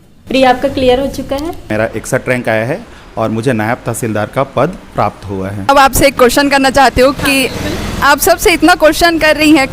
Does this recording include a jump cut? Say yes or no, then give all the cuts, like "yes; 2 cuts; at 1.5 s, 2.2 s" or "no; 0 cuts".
yes; 2 cuts; at 1.7 s, 5.7 s